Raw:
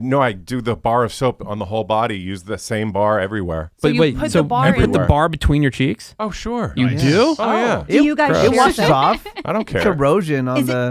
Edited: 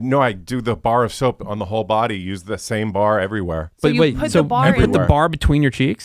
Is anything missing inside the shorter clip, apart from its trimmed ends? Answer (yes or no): no